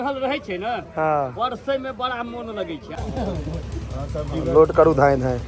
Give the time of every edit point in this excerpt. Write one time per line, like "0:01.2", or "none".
0:02.9